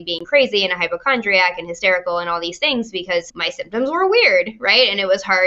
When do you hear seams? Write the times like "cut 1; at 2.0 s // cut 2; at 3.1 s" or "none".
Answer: cut 1; at 3.4 s